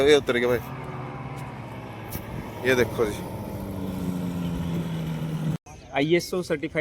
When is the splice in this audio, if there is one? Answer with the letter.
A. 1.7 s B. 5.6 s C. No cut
B